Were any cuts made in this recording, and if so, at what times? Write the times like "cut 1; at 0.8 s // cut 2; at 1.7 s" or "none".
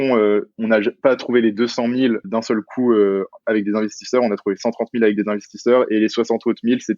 cut 1; at 2.3 s